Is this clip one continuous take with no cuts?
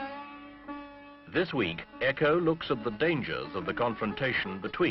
no; 1 cut; at 3.8 s

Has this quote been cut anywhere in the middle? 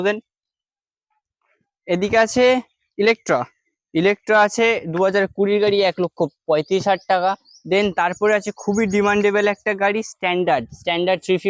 no; 0 cuts

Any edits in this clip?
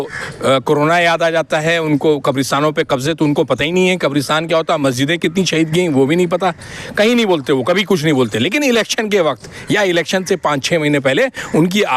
no; 0 cuts

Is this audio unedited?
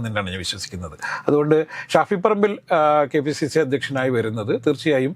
yes; 0 cuts

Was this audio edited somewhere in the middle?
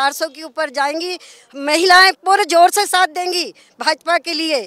no; 0 cuts

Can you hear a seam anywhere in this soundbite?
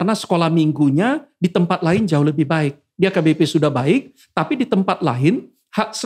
no; 0 cuts

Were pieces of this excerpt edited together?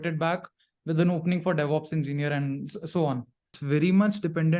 yes; 1 cut; at 3.6 s

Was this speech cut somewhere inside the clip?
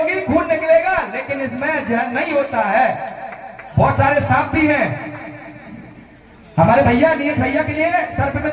no; 0 cuts

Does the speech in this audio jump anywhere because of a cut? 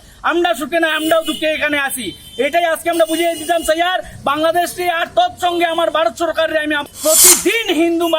yes; 1 cut; at 6.8 s

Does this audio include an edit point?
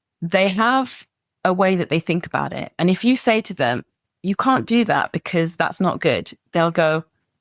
no; 0 cuts

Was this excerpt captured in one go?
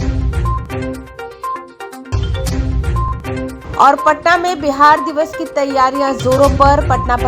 no; 1 cut; at 1.5 s

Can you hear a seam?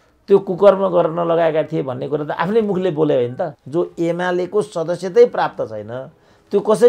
yes; 1 cut; at 3.6 s

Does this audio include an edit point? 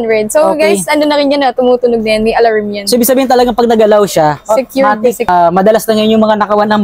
no; 0 cuts

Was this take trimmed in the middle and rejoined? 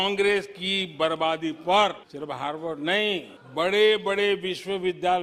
no; 0 cuts

